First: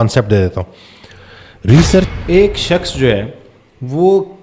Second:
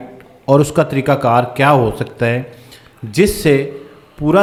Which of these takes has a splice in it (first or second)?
first